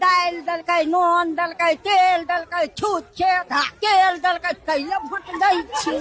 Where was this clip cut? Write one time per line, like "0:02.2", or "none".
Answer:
none